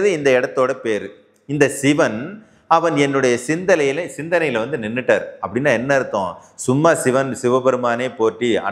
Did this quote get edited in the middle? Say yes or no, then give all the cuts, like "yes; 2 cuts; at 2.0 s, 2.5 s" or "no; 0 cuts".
no; 0 cuts